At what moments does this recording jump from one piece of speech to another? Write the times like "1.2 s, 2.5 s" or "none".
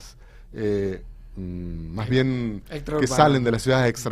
1.5 s